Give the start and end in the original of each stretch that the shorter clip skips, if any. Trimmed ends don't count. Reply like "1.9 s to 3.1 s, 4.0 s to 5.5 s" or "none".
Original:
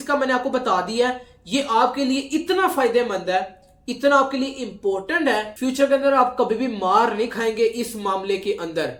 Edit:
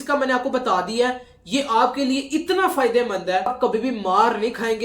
3.5 s to 6.3 s